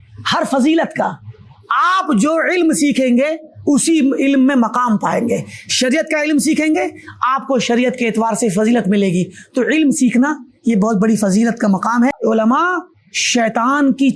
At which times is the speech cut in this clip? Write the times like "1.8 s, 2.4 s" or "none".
12.2 s